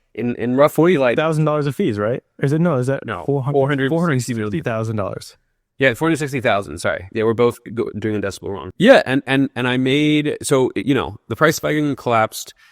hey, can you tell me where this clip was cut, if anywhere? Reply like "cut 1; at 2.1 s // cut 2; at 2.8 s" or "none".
cut 1; at 8.6 s